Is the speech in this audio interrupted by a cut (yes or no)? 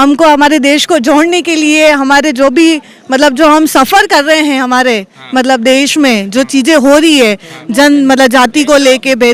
no